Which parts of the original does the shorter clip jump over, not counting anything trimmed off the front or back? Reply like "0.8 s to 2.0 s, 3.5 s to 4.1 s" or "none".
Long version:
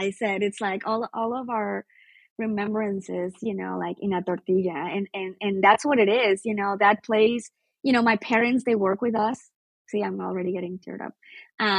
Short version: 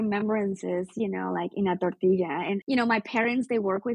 5.1 s to 7.8 s